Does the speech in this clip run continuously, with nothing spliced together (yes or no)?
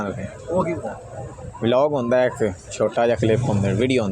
no